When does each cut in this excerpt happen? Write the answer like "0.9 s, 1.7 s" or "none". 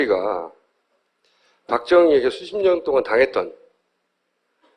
2.3 s